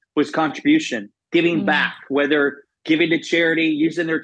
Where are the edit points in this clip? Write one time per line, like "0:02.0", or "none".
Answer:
none